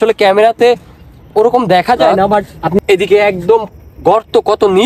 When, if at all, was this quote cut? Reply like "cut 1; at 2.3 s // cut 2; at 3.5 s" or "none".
cut 1; at 2.8 s